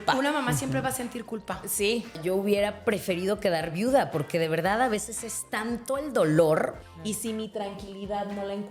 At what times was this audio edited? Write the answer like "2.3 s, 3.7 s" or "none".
2.1 s, 6.8 s